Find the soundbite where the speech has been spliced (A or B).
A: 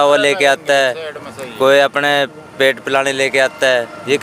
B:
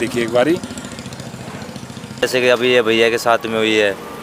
B